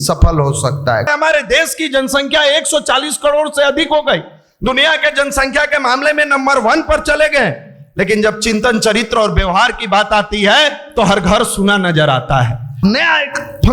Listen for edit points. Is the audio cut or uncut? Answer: cut